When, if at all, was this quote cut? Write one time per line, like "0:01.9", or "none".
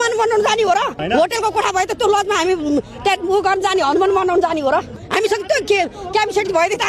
0:01.0
0:05.0